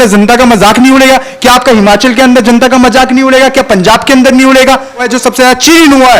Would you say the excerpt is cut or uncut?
cut